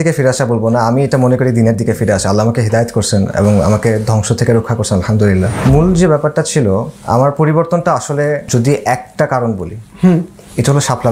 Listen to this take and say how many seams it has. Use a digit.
2